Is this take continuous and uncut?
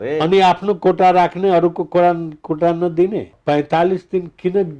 no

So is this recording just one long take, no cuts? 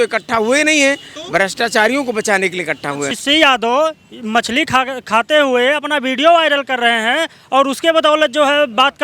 no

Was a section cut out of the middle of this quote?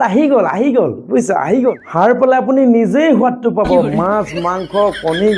yes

